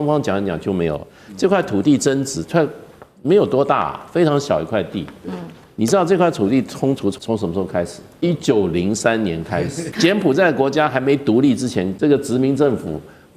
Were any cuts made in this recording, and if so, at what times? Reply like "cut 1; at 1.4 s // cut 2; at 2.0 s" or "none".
cut 1; at 7.2 s // cut 2; at 8.0 s // cut 3; at 9.8 s // cut 4; at 11.9 s